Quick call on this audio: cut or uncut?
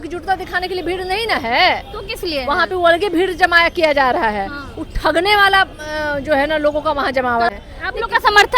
cut